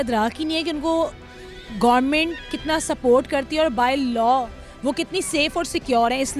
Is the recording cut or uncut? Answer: uncut